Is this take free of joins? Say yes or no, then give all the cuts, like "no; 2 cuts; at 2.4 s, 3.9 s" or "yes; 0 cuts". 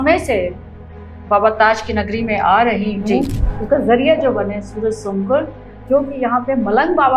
no; 1 cut; at 5.8 s